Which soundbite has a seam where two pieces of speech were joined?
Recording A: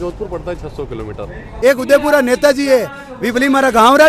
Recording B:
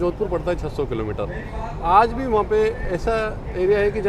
A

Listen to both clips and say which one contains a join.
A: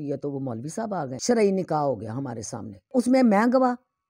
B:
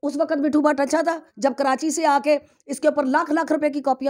A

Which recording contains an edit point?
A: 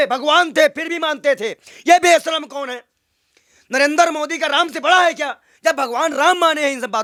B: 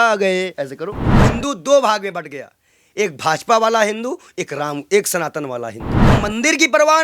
B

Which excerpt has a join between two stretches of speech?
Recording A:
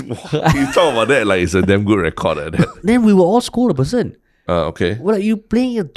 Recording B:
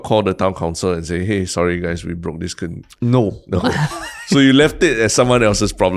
A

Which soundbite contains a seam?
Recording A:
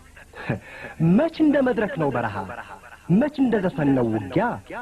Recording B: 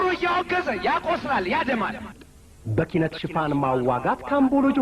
B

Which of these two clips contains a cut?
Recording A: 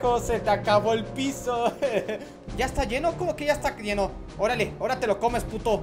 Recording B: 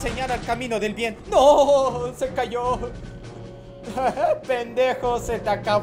A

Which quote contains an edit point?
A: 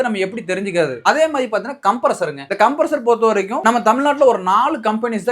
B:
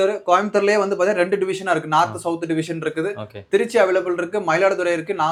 A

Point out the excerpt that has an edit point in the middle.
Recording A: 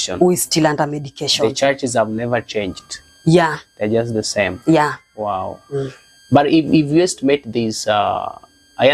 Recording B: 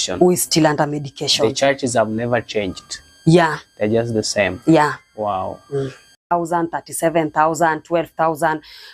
B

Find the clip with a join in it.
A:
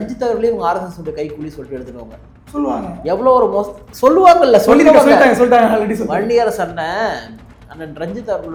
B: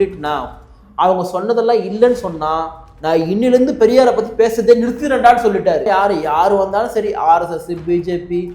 B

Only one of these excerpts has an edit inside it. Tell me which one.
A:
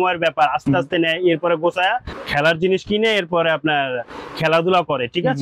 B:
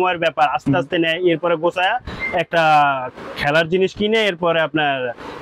A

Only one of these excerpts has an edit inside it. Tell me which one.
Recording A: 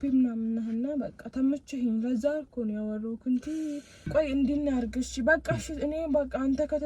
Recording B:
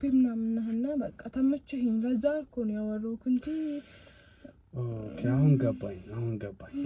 A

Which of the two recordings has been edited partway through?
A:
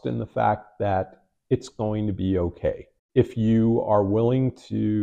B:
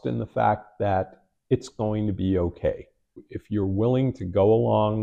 B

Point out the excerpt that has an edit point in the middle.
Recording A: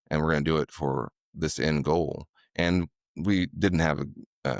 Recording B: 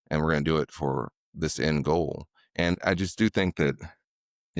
B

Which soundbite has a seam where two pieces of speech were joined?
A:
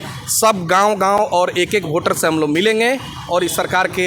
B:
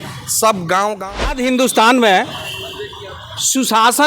B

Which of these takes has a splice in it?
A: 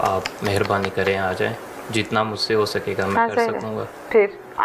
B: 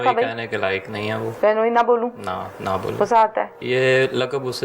B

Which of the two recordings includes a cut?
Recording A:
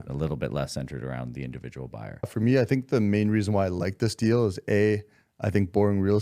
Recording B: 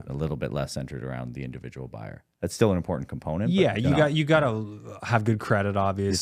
A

